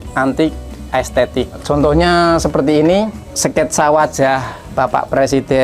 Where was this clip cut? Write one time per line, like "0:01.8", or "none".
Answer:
0:01.6
0:04.6